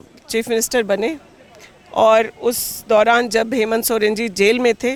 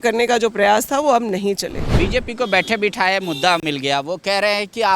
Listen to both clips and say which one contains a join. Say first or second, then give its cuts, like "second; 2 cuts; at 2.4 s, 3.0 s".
second; 1 cut; at 1.9 s